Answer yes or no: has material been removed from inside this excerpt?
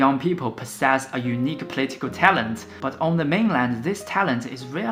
no